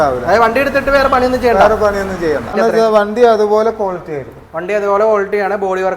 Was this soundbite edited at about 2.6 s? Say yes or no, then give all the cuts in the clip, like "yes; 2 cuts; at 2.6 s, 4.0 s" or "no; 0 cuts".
yes; 1 cut; at 2.6 s